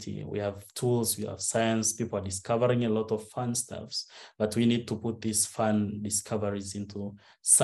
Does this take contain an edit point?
no; 0 cuts

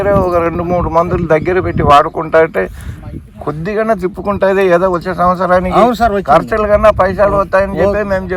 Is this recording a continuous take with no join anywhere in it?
yes; 0 cuts

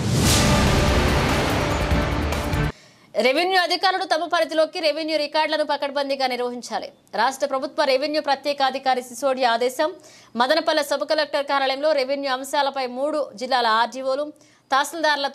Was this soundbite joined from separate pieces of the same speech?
yes; 1 cut; at 2.7 s

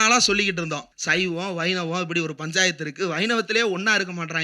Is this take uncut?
no; 1 cut; at 0.9 s

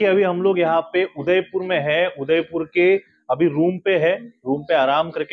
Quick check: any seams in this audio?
no; 0 cuts

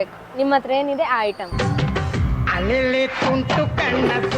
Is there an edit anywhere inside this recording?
yes; 1 cut; at 1.5 s

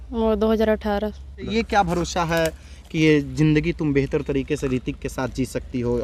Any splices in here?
yes; 1 cut; at 1.5 s

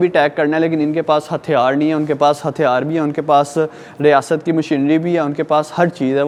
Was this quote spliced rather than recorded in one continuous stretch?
no; 0 cuts

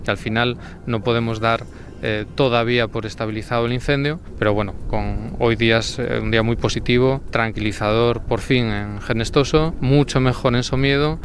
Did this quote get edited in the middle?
no; 0 cuts

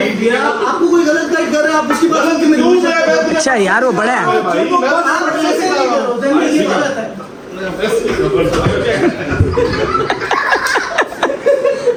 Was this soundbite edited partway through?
no; 0 cuts

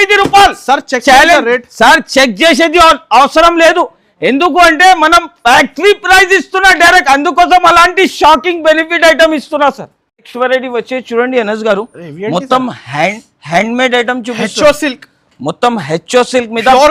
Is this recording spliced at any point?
no; 0 cuts

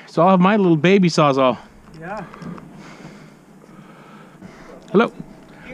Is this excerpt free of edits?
no; 1 cut; at 4.4 s

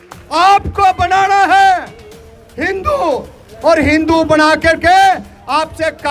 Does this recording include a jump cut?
no; 0 cuts

